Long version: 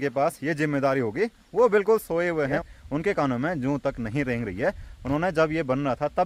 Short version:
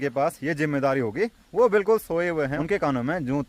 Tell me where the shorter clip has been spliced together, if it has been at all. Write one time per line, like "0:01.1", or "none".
0:02.5